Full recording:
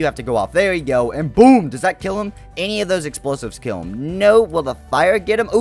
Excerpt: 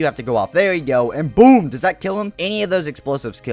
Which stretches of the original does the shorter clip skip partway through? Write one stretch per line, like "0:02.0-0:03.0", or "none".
0:02.3-0:02.5